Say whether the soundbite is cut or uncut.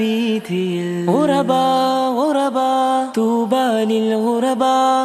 uncut